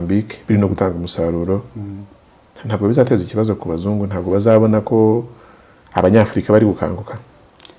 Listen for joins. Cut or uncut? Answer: uncut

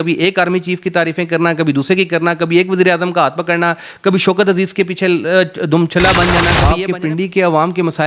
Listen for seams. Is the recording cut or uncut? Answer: cut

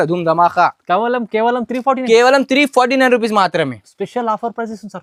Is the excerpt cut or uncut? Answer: uncut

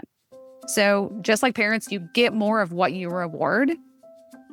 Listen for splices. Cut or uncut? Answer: uncut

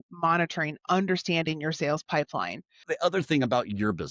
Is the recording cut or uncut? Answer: cut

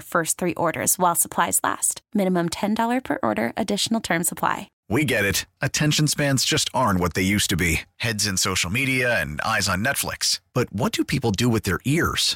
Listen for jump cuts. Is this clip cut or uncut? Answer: cut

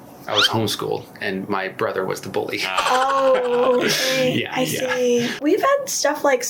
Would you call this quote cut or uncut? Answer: cut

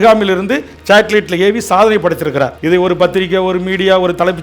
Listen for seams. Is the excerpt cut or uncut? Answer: cut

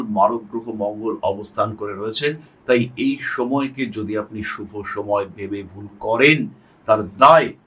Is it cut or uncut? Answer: uncut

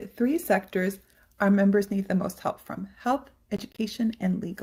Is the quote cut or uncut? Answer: uncut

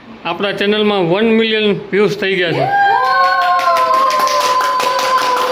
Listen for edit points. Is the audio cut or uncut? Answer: uncut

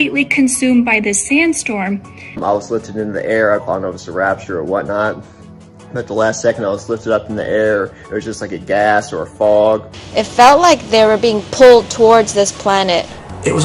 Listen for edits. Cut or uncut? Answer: cut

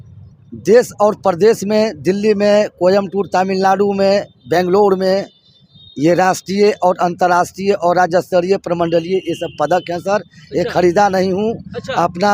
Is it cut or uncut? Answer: uncut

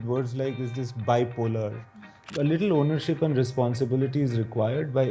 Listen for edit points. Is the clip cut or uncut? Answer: cut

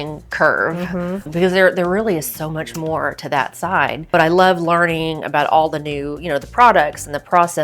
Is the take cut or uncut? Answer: cut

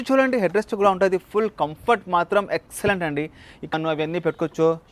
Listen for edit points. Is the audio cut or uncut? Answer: cut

